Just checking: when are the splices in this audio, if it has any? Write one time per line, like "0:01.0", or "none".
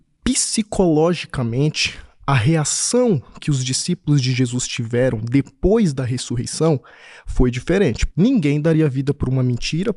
0:08.0